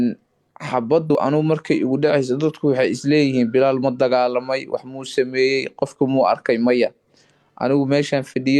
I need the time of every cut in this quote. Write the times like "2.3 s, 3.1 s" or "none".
1.1 s